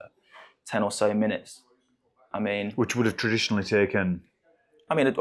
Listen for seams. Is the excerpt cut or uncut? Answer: uncut